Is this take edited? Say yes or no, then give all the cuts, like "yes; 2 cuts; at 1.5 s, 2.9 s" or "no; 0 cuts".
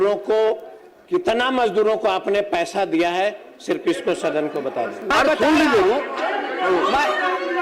yes; 1 cut; at 5.1 s